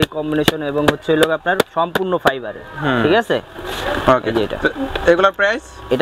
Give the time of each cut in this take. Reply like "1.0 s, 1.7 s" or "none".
none